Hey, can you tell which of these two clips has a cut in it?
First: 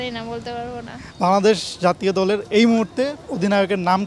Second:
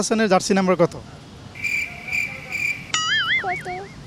first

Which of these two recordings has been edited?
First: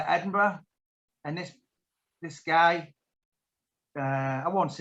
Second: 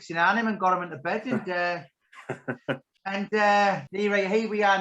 second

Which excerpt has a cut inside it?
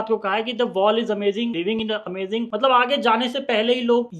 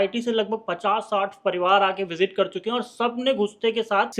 first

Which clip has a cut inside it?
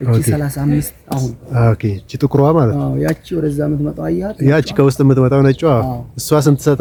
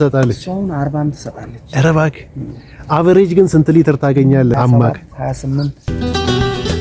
second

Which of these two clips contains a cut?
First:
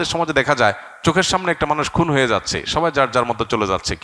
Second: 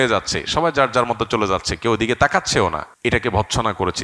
second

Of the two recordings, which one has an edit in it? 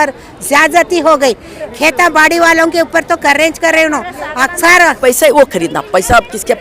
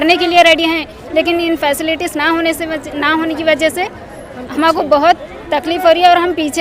first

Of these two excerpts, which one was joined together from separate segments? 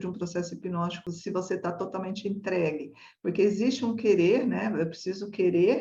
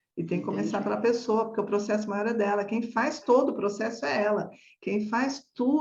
first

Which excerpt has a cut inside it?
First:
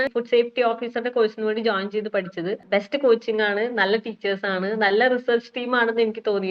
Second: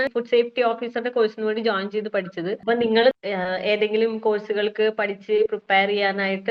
first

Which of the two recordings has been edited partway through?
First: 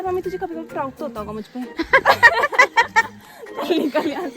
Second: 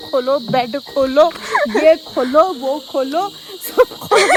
first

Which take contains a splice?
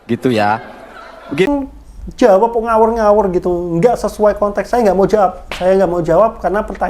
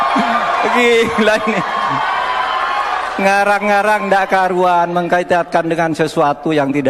first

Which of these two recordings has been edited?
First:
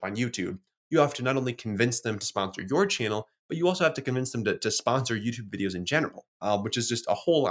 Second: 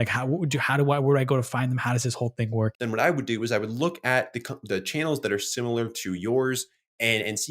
second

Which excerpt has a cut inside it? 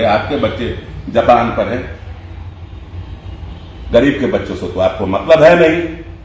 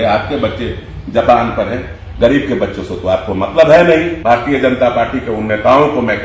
second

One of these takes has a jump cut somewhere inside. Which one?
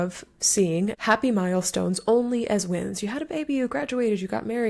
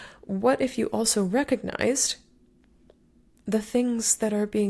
first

